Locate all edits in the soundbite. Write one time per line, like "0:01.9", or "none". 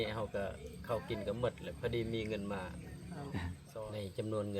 0:03.6